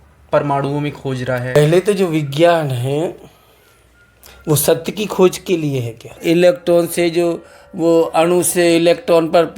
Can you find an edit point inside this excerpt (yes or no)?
yes